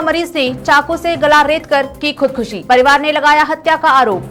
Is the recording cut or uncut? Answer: uncut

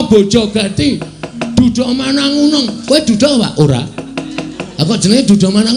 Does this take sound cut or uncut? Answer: cut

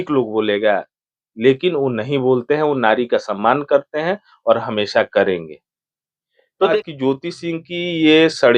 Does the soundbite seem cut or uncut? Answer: cut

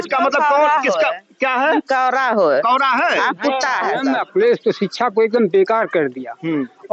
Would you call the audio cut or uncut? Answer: cut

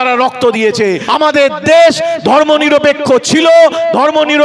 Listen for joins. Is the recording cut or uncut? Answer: cut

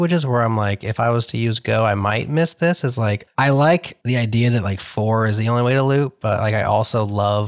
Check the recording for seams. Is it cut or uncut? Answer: cut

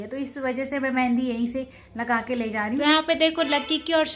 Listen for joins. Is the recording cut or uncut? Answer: cut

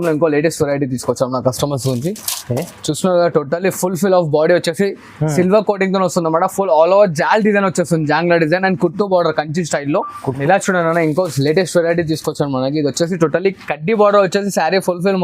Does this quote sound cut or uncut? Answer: cut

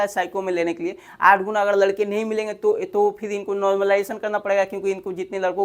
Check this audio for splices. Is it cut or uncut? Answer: uncut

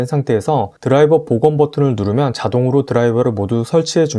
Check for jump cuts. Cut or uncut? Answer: uncut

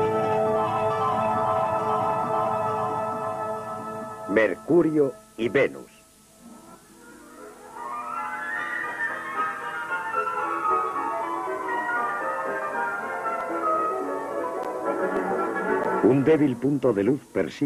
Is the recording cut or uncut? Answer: uncut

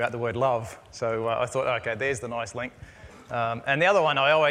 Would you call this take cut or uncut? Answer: uncut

